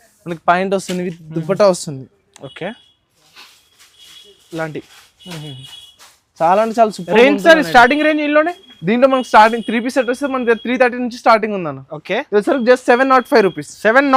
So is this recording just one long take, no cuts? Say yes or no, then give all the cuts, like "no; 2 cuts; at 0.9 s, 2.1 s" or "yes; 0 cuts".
yes; 0 cuts